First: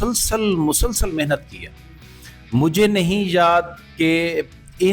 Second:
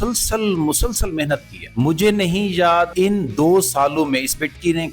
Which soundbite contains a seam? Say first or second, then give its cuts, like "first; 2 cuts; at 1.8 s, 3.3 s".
second; 2 cuts; at 1.6 s, 2.9 s